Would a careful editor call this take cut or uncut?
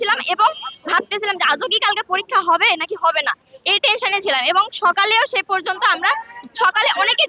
uncut